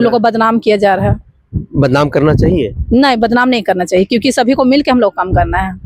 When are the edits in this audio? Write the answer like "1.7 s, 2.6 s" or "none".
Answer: none